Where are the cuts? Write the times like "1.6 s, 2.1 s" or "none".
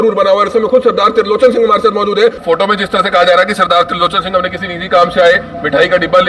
2.4 s